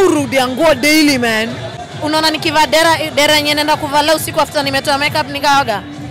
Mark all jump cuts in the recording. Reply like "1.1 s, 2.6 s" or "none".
1.8 s